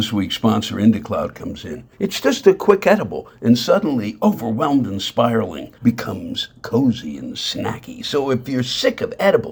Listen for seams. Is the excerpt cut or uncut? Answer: uncut